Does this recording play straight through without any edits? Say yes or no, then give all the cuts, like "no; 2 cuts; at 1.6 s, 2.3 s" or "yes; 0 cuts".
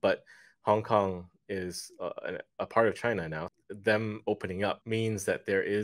no; 2 cuts; at 3.4 s, 4.8 s